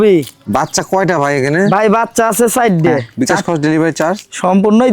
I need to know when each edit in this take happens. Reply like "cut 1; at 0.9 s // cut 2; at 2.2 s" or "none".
cut 1; at 3.1 s